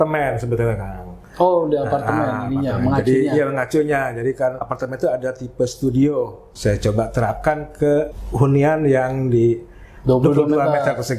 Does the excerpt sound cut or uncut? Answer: cut